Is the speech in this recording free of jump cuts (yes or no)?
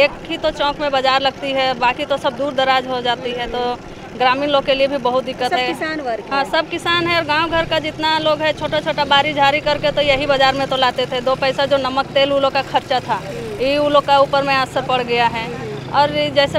yes